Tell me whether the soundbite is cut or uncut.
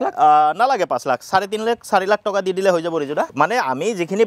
cut